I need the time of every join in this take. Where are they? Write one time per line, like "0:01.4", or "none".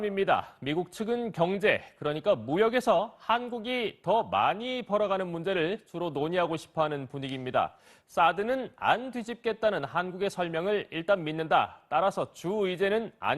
0:05.4